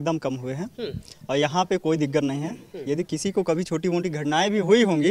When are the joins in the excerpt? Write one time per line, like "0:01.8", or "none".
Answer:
none